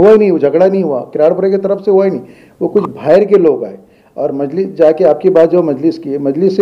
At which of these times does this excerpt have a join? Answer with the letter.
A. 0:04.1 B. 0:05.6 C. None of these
C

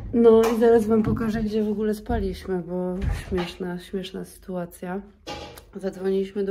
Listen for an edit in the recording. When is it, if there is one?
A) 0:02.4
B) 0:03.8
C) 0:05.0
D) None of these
D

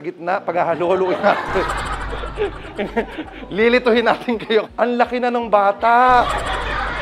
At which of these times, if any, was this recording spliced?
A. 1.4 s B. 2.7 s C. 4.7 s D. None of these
C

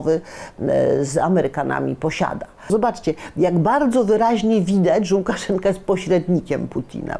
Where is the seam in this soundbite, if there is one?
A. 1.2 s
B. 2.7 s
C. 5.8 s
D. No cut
B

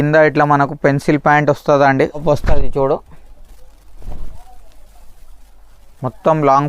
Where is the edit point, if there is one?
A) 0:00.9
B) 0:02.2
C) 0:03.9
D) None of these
B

